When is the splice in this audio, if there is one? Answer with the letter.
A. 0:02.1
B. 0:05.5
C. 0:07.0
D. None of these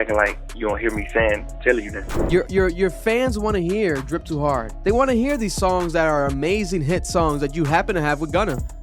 A